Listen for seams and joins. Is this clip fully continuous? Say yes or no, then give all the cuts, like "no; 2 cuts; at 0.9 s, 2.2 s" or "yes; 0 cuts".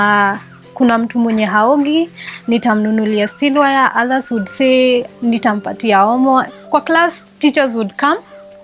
no; 1 cut; at 6.5 s